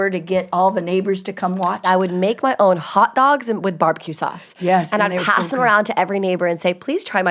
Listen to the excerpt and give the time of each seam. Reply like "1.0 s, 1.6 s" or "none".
1.8 s